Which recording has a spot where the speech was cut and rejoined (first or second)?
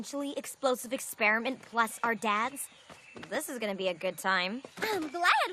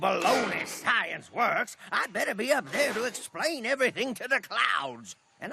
first